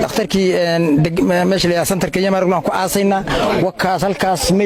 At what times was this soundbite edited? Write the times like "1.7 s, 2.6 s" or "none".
none